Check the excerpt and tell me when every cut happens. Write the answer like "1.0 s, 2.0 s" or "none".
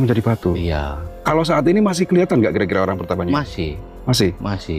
1.0 s